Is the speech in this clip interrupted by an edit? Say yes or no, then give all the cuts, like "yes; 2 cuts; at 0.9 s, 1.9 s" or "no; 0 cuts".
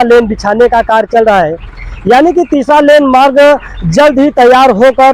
no; 0 cuts